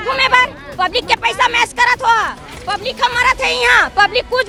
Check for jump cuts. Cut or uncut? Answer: uncut